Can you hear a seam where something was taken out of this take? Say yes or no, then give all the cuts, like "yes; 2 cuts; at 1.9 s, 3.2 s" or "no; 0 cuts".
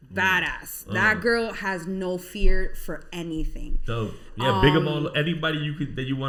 no; 0 cuts